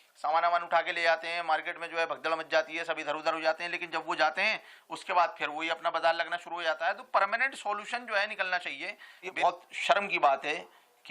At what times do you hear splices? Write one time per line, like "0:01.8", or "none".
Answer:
0:09.3